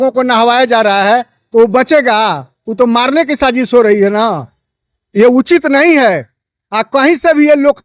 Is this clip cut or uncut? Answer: uncut